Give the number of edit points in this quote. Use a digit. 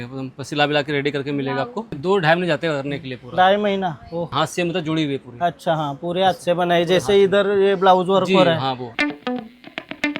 3